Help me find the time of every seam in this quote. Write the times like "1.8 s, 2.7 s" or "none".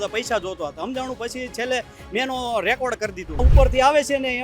3.4 s